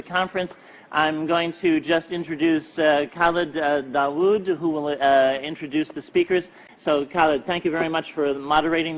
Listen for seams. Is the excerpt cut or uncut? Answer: uncut